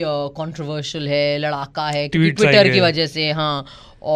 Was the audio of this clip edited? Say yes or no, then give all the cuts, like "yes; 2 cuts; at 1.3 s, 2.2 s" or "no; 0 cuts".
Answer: no; 0 cuts